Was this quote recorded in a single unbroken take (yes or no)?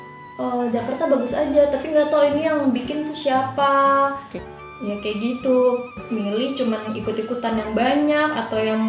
no